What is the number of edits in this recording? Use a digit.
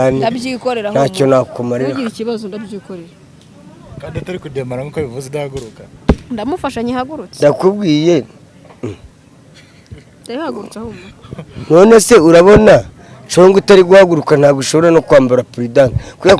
0